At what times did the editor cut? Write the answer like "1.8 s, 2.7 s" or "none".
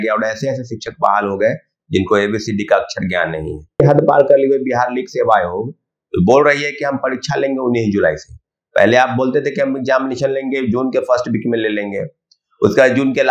3.7 s